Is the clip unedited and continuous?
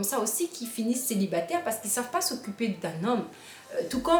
yes; 0 cuts

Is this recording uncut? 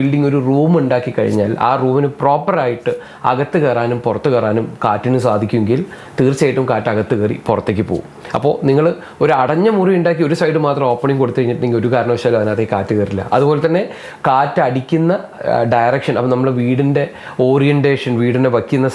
yes; 0 cuts

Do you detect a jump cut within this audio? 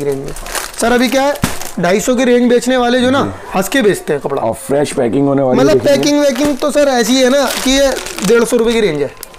no; 0 cuts

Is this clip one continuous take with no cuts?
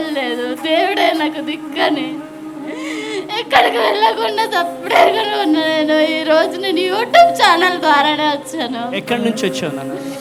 yes; 0 cuts

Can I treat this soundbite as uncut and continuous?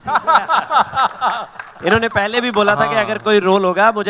yes; 0 cuts

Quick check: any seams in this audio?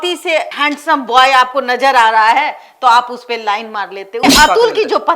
yes; 1 cut; at 4.2 s

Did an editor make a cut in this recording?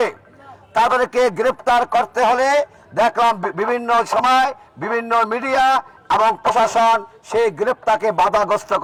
no; 0 cuts

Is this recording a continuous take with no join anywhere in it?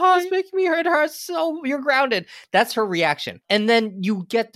no; 1 cut; at 3.3 s

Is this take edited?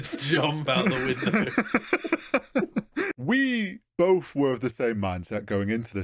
yes; 2 cuts; at 3.1 s, 3.8 s

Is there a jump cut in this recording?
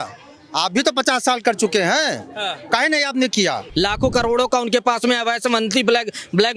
yes; 1 cut; at 3.7 s

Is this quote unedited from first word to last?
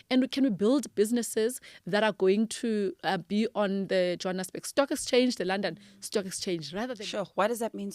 no; 1 cut; at 6.9 s

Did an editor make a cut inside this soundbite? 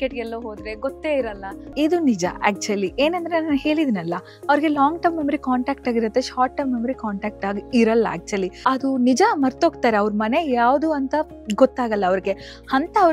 yes; 2 cuts; at 1.7 s, 8.5 s

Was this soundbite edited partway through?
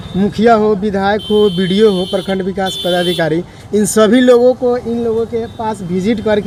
no; 0 cuts

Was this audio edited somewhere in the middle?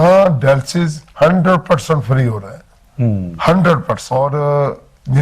yes; 1 cut; at 4.0 s

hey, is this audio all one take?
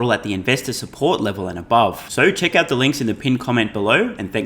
yes; 0 cuts

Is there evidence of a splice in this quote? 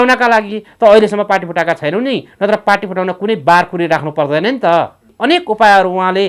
yes; 1 cut; at 5.1 s

